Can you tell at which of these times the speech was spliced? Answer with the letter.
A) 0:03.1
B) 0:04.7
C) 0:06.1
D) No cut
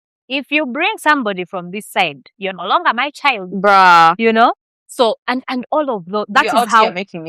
D